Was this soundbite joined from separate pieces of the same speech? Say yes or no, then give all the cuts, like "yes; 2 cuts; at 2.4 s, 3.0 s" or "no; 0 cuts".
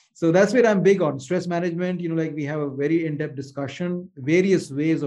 no; 0 cuts